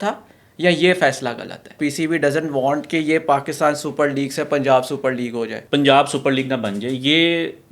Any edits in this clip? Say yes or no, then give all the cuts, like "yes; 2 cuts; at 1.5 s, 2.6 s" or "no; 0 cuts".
yes; 2 cuts; at 1.8 s, 5.6 s